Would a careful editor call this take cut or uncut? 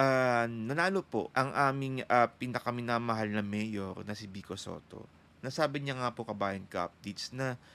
cut